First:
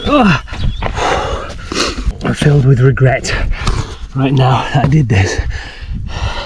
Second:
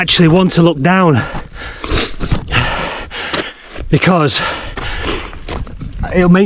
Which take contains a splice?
first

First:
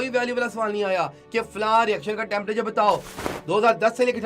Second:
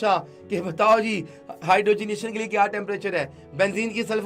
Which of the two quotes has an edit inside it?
first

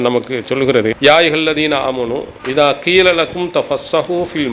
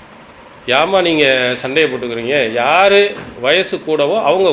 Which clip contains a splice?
first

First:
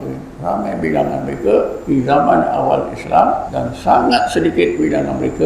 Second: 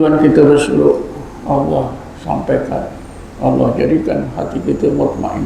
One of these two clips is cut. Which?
first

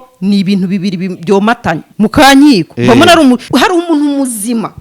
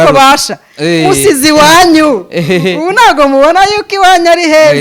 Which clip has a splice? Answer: first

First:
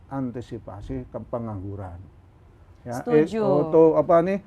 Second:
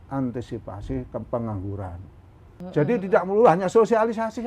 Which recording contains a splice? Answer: second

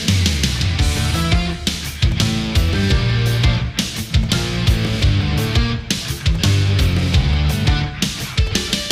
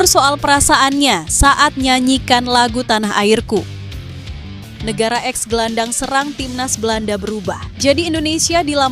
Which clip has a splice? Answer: second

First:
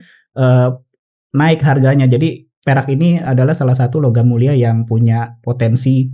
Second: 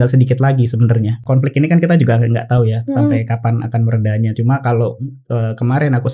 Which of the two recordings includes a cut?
second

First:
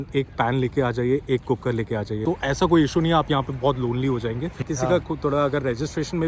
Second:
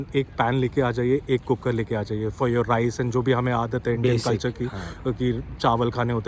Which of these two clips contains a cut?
first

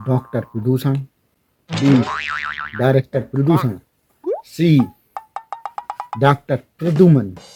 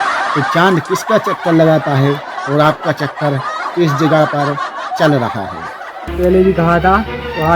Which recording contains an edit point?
second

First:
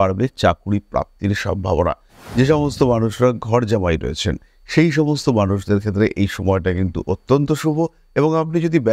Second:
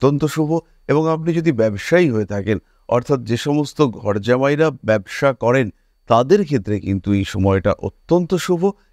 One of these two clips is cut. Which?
first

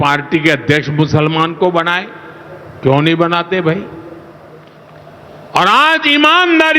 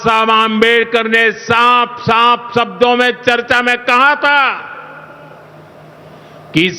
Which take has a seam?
first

